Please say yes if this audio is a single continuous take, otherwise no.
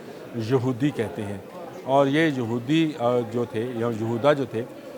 yes